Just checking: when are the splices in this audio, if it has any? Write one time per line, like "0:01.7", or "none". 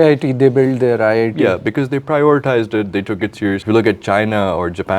0:03.6